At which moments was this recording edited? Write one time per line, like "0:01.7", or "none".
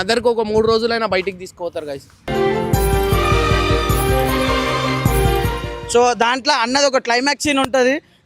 0:05.8

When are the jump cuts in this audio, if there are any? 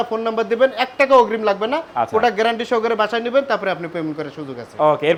none

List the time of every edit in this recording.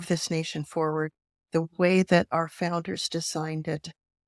none

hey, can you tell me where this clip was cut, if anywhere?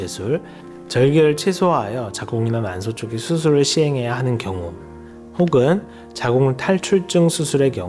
none

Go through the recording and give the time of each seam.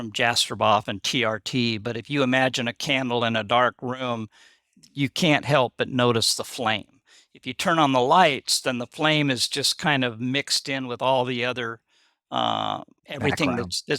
0:12.9

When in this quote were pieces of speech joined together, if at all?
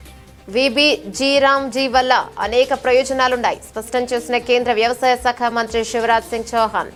none

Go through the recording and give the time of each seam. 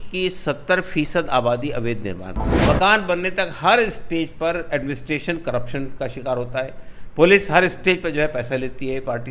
0:02.5

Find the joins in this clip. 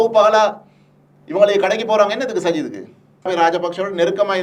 0:03.3

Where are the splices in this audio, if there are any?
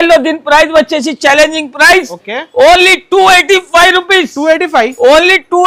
none

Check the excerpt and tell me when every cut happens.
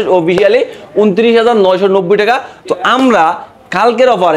none

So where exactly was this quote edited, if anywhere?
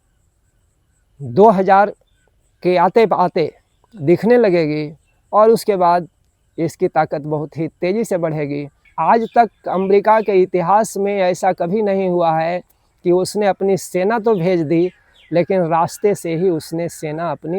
0:08.9

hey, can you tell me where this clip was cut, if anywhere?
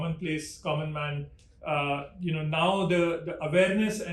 none

